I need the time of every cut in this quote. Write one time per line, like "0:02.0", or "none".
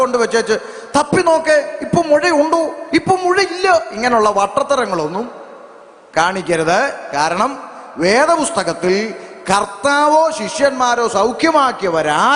none